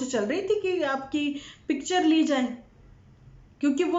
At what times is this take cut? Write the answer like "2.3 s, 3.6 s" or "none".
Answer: none